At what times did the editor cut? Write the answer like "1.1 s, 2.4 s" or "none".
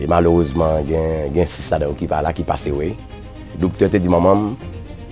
3.5 s